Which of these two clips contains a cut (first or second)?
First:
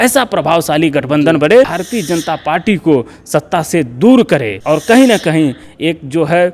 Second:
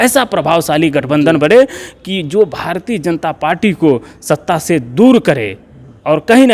first